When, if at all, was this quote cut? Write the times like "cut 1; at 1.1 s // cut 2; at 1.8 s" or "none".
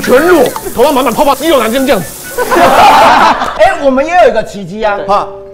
cut 1; at 3.5 s